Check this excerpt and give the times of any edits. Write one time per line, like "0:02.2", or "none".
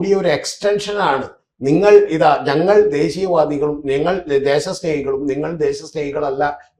none